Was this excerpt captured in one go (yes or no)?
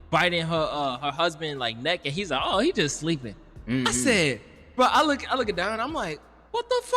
yes